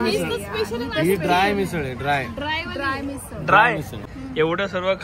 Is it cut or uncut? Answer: cut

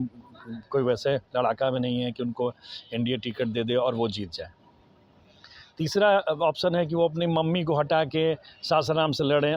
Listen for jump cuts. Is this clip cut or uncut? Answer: uncut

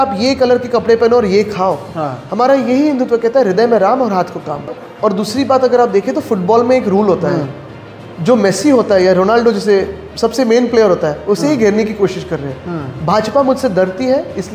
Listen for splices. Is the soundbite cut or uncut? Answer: cut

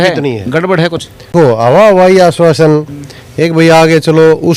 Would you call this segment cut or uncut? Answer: cut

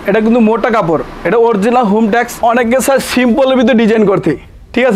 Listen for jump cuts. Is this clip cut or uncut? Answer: cut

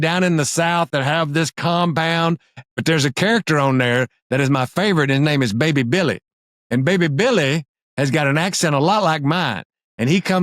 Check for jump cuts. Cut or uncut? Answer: cut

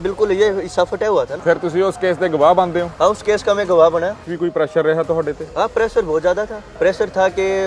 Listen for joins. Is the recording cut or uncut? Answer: cut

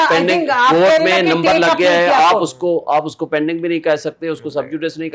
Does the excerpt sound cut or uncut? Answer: uncut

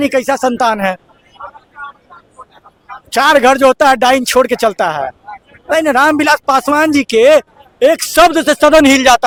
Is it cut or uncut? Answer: uncut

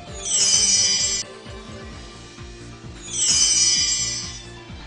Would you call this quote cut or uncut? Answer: uncut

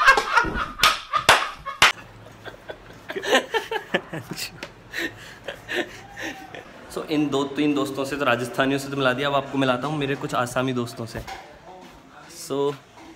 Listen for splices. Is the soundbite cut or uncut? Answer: uncut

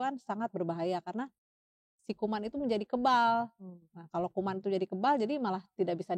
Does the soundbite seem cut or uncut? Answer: uncut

